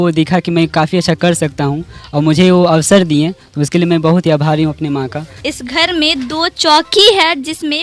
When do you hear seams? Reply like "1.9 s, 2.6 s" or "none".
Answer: 5.4 s